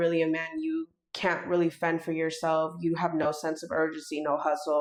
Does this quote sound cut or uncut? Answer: uncut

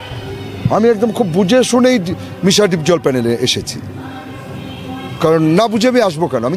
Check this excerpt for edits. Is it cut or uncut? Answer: uncut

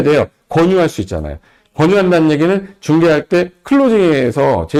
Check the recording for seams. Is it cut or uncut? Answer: uncut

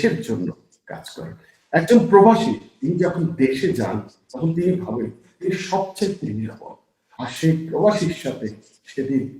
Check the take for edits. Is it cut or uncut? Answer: uncut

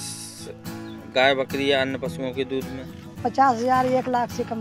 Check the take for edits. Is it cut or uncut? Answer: cut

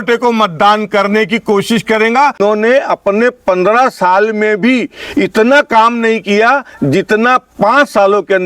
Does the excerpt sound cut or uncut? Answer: cut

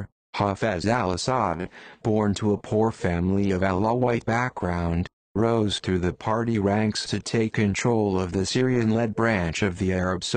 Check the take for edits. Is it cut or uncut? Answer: uncut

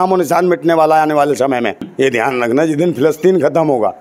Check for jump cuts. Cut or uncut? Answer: cut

